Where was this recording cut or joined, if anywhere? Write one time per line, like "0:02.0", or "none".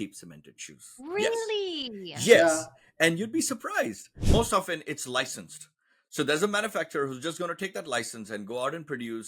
0:04.2